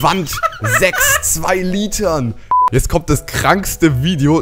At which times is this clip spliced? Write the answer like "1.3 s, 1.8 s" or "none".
2.6 s